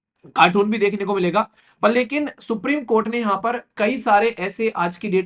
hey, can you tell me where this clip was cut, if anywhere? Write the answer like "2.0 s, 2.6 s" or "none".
1.6 s